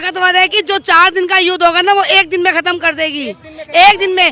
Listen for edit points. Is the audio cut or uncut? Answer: uncut